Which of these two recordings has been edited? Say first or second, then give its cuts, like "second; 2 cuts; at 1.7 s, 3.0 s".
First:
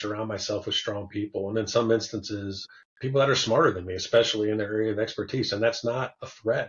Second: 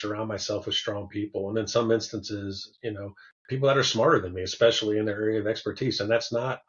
first; 1 cut; at 2.7 s